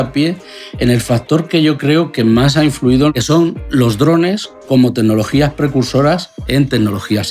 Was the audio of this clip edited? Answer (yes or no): yes